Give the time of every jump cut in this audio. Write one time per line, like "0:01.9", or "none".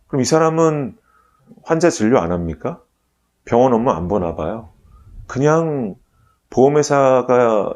0:01.0